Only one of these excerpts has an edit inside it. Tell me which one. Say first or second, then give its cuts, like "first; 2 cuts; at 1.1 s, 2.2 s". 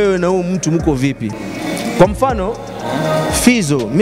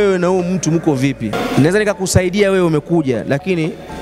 second; 1 cut; at 1.3 s